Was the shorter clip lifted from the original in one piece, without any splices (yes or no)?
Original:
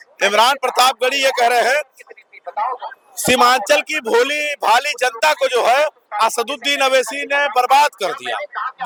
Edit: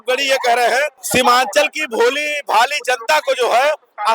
no